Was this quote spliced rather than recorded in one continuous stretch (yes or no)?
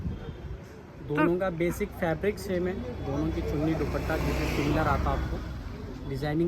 no